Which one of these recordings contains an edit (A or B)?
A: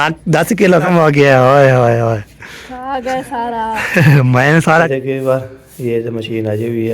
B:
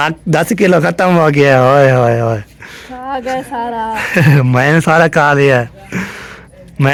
A